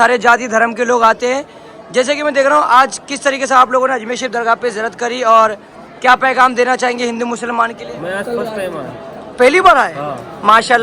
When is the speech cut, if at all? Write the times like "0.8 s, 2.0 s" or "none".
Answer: 7.8 s